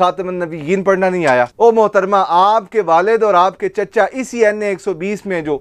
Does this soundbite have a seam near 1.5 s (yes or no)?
yes